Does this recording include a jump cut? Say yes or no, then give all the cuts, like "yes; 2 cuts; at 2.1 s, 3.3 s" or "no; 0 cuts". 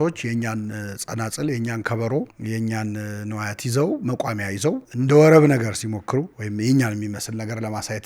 yes; 3 cuts; at 2.4 s, 4.9 s, 6.4 s